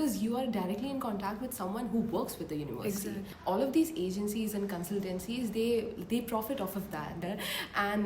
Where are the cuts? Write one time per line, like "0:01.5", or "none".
0:03.2
0:07.2